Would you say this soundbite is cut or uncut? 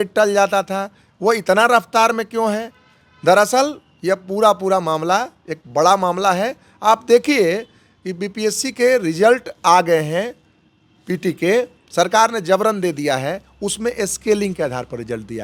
uncut